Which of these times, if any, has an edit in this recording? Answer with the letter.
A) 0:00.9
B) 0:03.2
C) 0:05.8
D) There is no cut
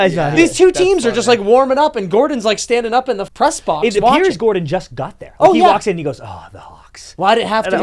B